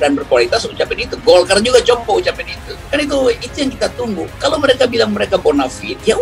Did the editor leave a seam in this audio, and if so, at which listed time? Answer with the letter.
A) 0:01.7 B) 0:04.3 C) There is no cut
B